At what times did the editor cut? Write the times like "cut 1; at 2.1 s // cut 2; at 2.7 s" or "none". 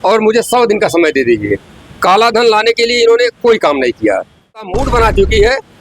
cut 1; at 4.6 s